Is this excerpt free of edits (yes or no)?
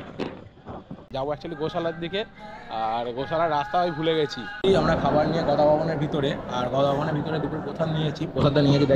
no